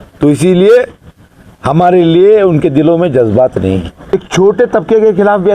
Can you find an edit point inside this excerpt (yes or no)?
yes